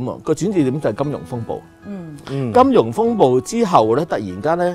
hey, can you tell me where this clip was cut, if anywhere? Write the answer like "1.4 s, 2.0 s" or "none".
none